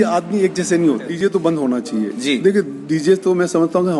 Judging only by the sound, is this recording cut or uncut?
cut